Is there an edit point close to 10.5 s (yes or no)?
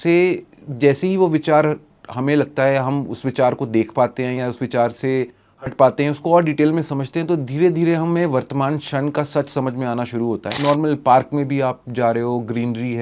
yes